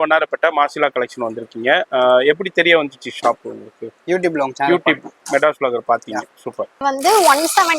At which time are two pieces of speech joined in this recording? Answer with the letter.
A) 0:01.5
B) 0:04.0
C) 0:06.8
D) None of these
C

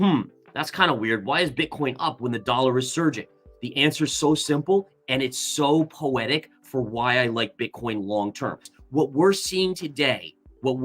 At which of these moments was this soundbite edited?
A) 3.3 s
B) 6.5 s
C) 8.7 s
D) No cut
C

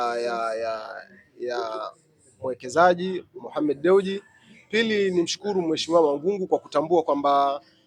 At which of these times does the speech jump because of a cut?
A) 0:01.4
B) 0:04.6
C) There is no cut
C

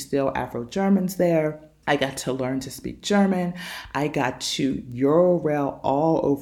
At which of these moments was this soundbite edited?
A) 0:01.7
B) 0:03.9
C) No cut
A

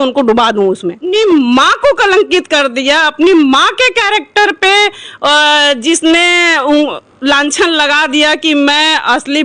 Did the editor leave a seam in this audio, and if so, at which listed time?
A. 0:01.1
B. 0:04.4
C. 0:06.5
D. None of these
A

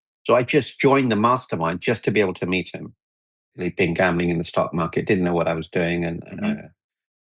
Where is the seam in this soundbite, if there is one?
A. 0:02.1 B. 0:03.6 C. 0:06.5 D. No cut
B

